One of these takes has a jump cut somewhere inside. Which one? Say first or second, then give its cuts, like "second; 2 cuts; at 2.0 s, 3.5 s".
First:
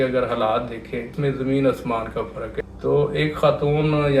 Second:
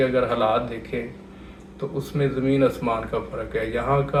first; 2 cuts; at 1.1 s, 2.6 s